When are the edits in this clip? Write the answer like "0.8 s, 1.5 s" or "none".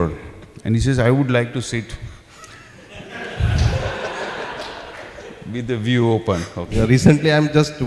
6.7 s